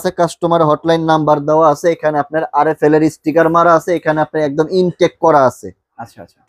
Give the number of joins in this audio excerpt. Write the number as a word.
zero